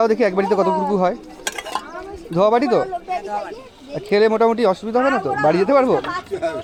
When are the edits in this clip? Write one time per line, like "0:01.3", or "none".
none